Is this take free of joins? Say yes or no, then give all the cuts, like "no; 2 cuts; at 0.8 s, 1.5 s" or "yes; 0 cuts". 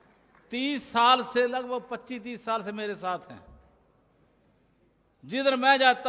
yes; 0 cuts